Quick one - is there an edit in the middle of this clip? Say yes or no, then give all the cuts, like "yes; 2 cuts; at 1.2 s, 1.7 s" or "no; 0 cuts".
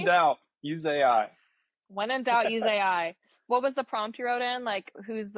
no; 0 cuts